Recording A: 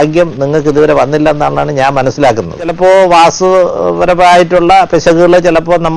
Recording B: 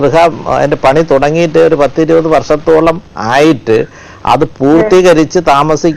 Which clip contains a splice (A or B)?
A